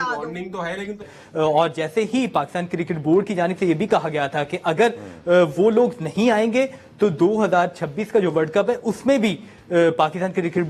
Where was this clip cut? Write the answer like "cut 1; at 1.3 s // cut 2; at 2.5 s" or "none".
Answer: cut 1; at 1.0 s